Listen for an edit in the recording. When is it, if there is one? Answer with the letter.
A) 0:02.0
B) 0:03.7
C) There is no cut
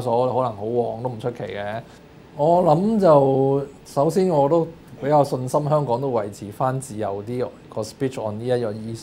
A